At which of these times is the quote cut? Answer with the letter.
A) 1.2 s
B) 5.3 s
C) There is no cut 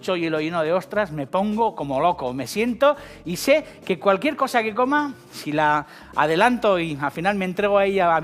C